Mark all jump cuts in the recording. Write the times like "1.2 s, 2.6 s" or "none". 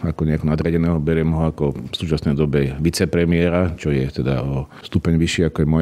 1.9 s, 4.7 s